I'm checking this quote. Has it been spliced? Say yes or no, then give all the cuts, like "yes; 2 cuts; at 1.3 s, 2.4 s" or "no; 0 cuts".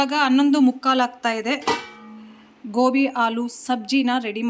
no; 0 cuts